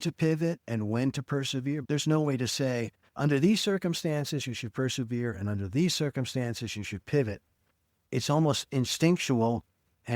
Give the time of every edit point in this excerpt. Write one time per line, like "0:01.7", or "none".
0:01.8